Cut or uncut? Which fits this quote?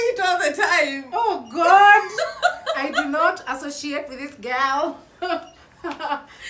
uncut